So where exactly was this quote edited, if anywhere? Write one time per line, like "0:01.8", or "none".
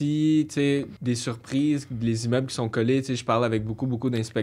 0:00.9

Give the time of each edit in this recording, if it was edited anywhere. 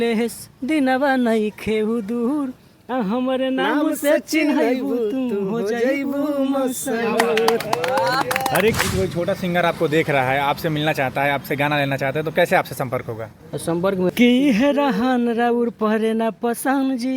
0:08.8
0:14.1

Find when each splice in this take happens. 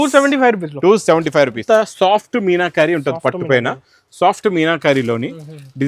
0:01.6

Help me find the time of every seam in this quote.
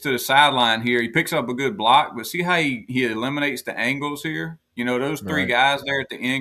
none

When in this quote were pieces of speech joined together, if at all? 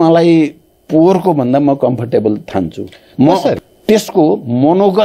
0:03.6

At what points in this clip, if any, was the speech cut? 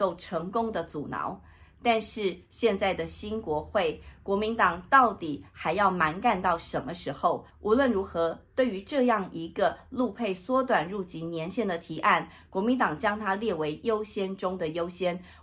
0:07.5

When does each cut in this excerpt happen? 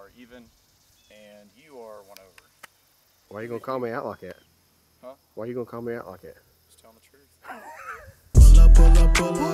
0:08.2

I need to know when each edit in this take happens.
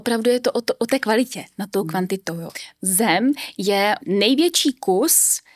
0:02.5
0:04.0

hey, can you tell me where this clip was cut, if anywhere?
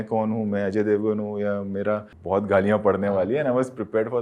0:02.1

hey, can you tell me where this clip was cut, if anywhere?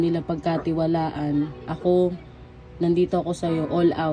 none

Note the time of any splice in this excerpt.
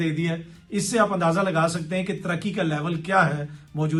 none

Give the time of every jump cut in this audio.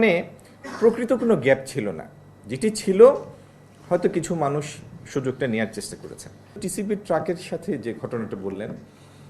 0:06.7

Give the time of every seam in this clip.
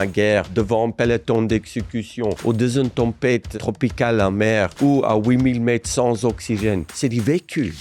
0:02.4
0:03.5
0:04.7
0:06.9

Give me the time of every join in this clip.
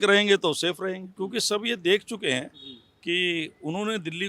0:01.1

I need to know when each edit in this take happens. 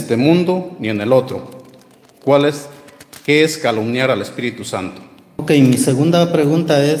0:05.4

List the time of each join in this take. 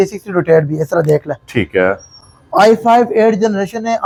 none

